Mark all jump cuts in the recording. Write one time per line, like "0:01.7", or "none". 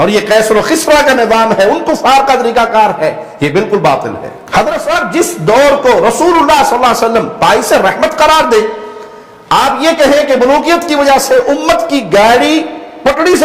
0:04.3